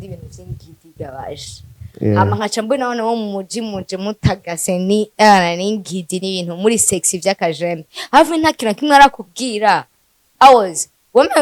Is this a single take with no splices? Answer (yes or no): yes